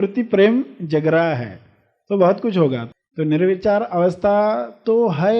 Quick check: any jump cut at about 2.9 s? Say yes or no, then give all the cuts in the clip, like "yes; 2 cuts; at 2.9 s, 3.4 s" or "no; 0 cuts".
yes; 1 cut; at 2.9 s